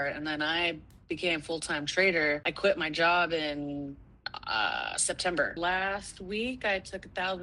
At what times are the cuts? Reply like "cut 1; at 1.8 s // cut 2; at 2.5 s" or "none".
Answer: cut 1; at 2.5 s // cut 2; at 5.6 s

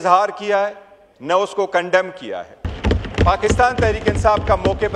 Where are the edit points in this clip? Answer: cut 1; at 2.8 s

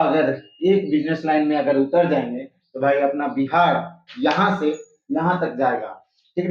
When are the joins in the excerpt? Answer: none

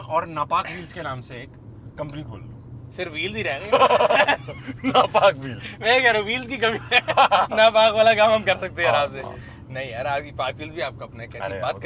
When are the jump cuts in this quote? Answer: none

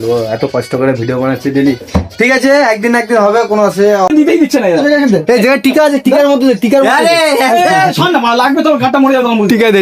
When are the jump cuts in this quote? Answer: cut 1; at 4.1 s

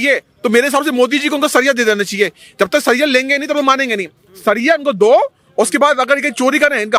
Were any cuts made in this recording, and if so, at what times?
none

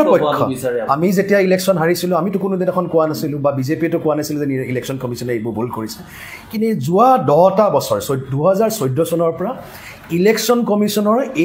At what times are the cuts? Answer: none

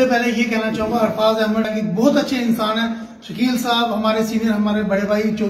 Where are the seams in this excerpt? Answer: cut 1; at 1.7 s

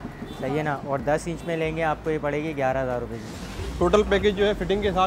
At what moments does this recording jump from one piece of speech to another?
cut 1; at 3.6 s

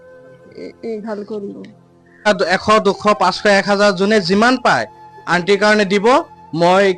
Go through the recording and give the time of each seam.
cut 1; at 2.3 s

